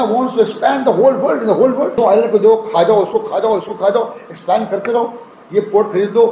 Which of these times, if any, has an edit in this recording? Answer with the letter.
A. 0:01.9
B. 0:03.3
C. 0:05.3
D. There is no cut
A